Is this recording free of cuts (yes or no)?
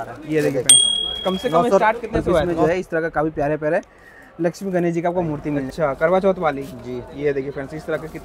no